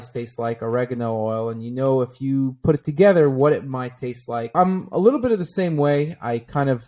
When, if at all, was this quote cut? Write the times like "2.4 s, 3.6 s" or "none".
4.5 s